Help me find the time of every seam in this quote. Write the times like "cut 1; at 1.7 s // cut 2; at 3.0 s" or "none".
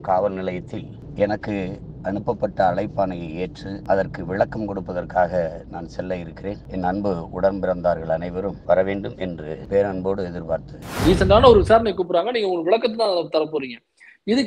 cut 1; at 1.0 s // cut 2; at 3.7 s // cut 3; at 6.6 s // cut 4; at 8.6 s // cut 5; at 9.6 s // cut 6; at 10.9 s